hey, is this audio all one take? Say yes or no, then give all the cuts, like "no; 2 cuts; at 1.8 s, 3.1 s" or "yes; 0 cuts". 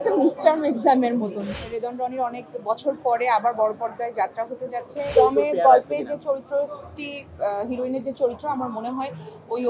no; 2 cuts; at 1.4 s, 5.1 s